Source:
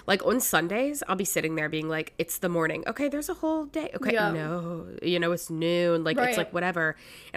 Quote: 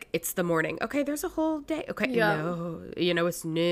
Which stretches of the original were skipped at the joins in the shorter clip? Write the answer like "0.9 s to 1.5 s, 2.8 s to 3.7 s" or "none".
none

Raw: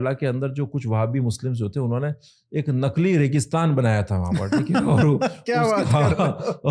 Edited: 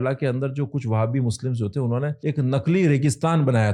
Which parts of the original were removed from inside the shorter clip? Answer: 2.2 s to 2.5 s

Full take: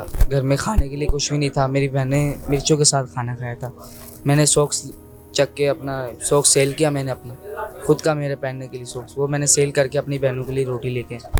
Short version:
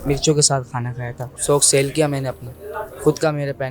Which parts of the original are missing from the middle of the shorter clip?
3.7 s to 6.1 s

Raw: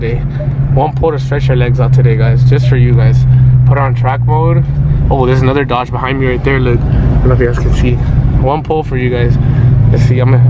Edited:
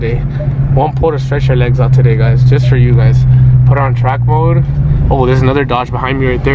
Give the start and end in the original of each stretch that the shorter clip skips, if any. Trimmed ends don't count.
none

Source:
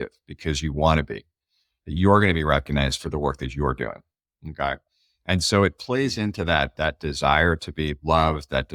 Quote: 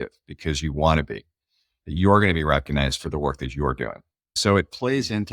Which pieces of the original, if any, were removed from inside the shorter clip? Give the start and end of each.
4.4 s to 5.4 s

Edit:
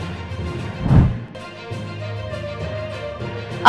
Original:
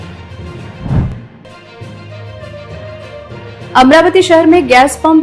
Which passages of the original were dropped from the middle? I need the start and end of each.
1.1 s to 1.2 s

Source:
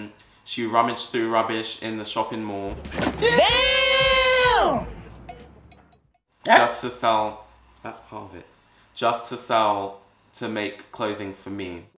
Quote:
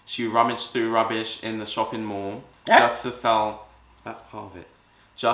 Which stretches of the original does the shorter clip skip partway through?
2.8 s to 6.2 s

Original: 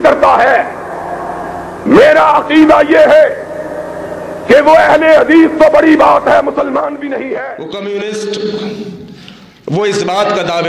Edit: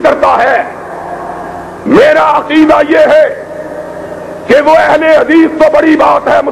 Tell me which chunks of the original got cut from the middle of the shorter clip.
none

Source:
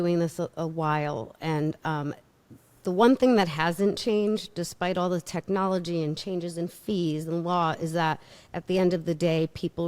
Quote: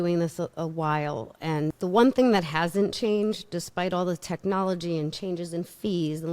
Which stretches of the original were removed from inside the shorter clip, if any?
1.8 s to 2.8 s

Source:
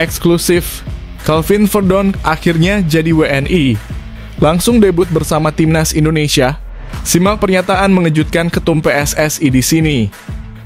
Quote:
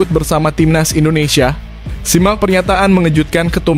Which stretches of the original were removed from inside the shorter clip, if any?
none

